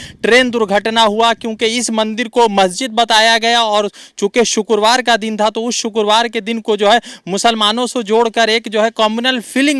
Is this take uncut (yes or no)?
yes